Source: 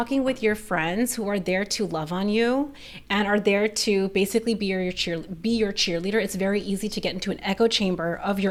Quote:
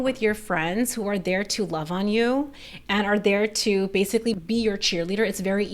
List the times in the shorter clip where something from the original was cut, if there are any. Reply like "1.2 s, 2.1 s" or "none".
4.4 s